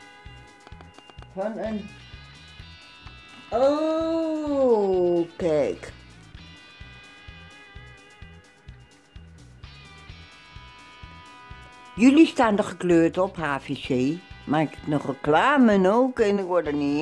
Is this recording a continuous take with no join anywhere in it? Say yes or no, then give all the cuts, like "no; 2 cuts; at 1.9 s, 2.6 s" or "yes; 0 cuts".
yes; 0 cuts